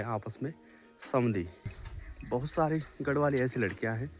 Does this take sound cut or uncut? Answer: cut